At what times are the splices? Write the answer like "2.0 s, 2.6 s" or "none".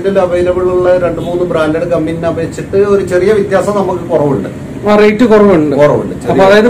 none